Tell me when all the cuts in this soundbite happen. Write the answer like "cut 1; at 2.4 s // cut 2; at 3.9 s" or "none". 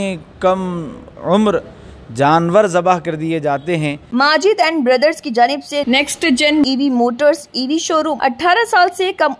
cut 1; at 4.1 s // cut 2; at 8.1 s